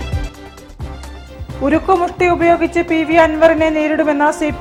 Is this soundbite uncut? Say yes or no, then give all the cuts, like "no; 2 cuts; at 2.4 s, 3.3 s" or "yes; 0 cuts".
yes; 0 cuts